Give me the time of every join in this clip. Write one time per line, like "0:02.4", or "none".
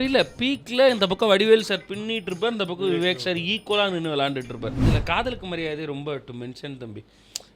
0:04.9